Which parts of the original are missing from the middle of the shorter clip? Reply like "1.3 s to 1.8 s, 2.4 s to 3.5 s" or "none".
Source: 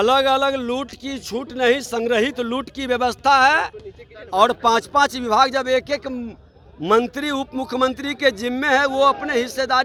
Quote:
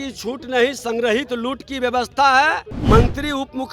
3.8 s to 6.7 s